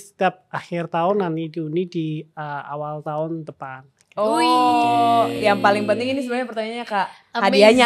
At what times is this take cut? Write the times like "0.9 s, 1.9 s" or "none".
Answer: none